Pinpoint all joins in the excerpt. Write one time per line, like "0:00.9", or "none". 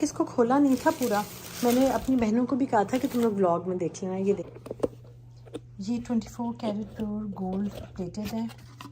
0:04.5